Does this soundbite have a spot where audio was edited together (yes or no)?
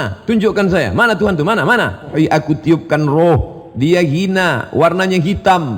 yes